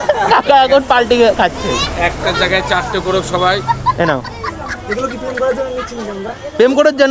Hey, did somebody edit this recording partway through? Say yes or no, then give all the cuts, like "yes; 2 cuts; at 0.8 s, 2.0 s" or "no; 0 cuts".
no; 0 cuts